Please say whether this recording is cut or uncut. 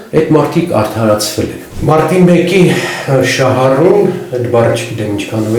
cut